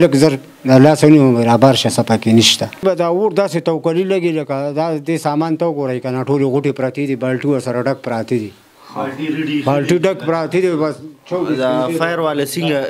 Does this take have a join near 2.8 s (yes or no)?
yes